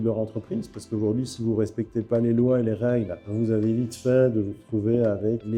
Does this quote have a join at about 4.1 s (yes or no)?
no